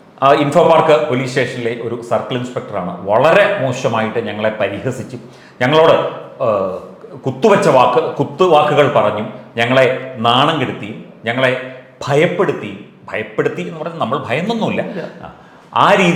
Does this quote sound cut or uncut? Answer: uncut